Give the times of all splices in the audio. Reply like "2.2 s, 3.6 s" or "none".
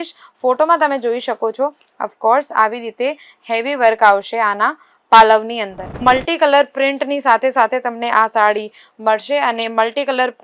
6.0 s